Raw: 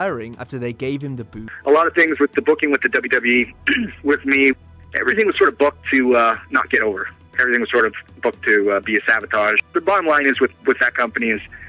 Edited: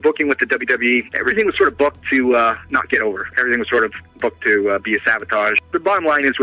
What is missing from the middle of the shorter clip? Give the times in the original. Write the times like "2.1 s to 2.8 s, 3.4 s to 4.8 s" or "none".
3.5 s to 4.9 s, 7.1 s to 7.3 s